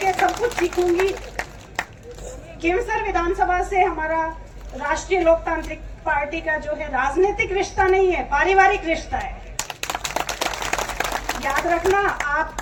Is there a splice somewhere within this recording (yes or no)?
no